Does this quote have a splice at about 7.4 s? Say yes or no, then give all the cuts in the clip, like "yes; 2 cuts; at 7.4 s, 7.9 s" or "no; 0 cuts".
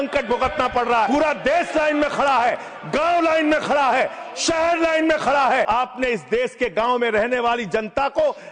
no; 2 cuts; at 1.1 s, 5.7 s